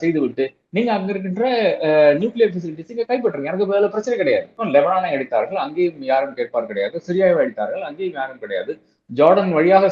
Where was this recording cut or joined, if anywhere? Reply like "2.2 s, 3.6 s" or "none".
4.6 s